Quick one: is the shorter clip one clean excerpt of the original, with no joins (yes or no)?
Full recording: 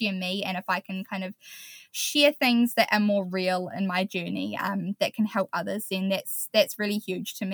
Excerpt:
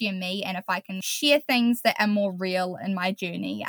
no